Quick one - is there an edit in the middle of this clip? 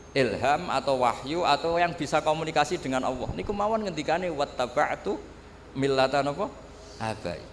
no; 0 cuts

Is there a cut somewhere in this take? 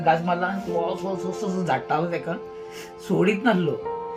no; 0 cuts

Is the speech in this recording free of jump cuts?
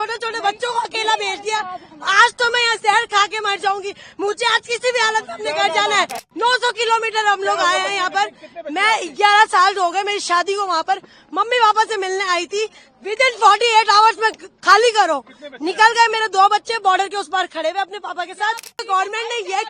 no; 2 cuts; at 6.3 s, 18.8 s

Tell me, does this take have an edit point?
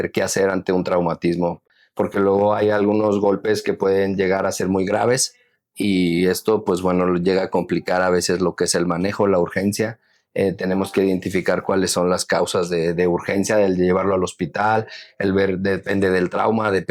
no; 0 cuts

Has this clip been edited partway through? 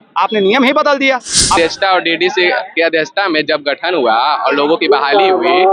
yes; 1 cut; at 1.6 s

